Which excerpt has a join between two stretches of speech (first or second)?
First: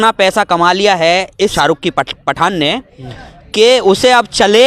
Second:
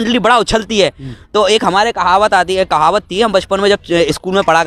first